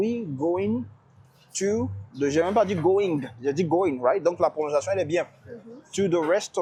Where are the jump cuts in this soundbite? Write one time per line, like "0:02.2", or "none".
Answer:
none